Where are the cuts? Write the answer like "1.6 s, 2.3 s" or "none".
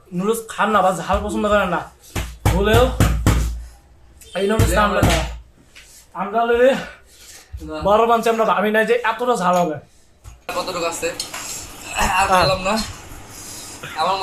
10.5 s